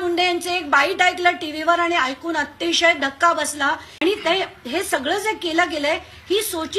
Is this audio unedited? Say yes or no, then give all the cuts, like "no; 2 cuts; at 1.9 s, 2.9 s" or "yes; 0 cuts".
no; 1 cut; at 3.9 s